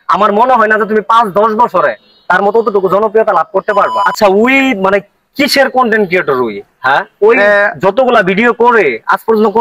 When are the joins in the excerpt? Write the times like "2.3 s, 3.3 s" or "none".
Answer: 4.0 s